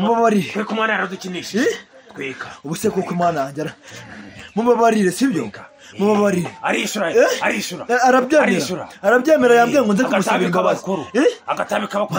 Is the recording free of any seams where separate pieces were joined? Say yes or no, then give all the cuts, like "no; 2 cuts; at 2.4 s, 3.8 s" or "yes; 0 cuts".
yes; 0 cuts